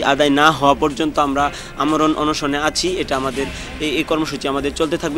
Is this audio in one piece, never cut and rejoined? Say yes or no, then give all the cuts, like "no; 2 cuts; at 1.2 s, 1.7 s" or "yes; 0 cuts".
yes; 0 cuts